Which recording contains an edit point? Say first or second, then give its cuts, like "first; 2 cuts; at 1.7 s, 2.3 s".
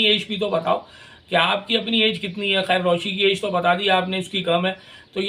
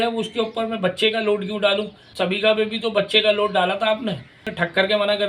second; 2 cuts; at 2.0 s, 4.5 s